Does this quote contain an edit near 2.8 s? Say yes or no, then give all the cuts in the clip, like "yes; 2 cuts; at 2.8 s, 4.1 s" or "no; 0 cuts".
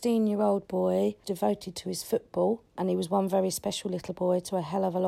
yes; 2 cuts; at 1.3 s, 2.8 s